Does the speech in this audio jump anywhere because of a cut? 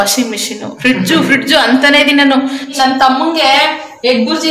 yes; 1 cut; at 2.7 s

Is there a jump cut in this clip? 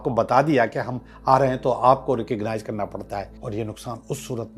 yes; 1 cut; at 3.4 s

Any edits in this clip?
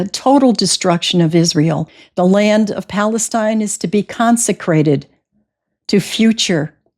yes; 1 cut; at 2.0 s

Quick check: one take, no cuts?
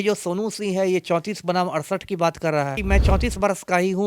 no; 1 cut; at 2.8 s

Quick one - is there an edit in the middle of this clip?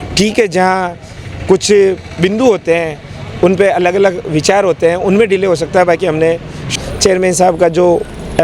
yes; 1 cut; at 6.6 s

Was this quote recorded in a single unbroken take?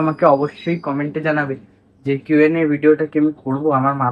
yes; 0 cuts

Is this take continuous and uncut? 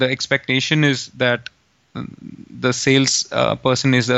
yes; 0 cuts

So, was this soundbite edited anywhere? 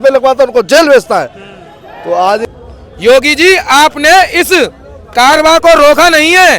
yes; 1 cut; at 2.5 s

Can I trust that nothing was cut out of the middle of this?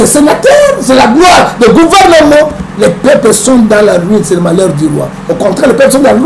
yes; 0 cuts

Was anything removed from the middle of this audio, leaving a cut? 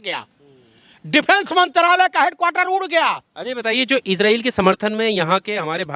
yes; 1 cut; at 3.3 s

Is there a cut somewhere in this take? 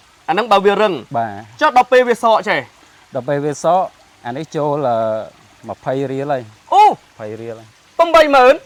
no; 0 cuts

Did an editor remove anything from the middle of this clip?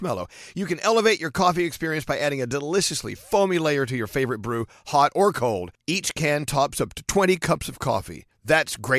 no; 0 cuts

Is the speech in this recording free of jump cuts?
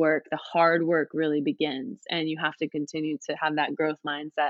yes; 0 cuts

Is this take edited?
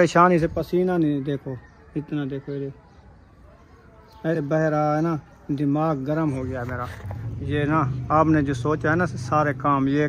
yes; 1 cut; at 4.3 s

